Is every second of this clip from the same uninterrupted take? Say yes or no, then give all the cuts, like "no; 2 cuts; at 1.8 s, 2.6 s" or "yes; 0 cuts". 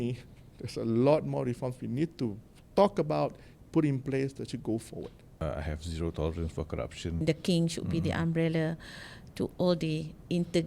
no; 2 cuts; at 5.4 s, 7.2 s